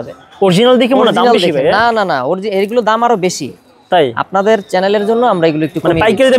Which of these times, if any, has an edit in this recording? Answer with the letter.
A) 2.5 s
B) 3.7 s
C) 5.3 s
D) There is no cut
D